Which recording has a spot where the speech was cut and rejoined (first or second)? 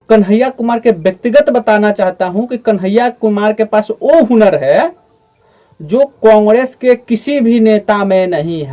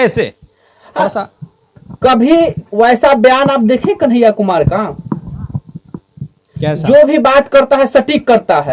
second